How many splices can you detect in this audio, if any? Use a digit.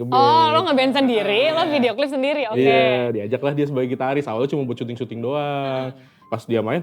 0